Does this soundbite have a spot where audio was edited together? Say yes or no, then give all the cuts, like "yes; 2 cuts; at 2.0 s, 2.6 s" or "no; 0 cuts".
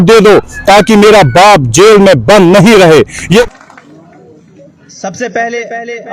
yes; 1 cut; at 3.4 s